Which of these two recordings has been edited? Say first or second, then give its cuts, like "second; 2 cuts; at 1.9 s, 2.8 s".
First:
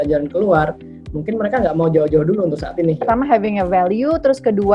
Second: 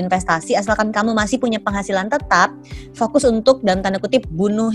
first; 1 cut; at 3.0 s